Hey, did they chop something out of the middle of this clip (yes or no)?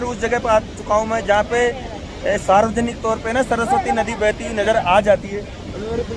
no